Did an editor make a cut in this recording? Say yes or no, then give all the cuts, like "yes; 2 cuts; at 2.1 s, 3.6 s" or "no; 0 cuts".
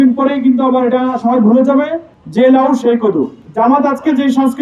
no; 0 cuts